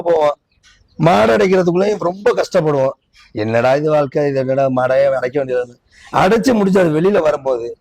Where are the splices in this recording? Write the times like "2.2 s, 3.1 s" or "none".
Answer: none